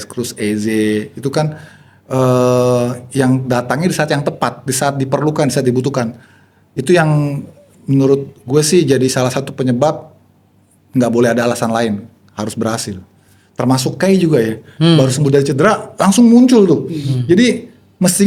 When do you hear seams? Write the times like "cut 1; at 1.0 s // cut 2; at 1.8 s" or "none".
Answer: none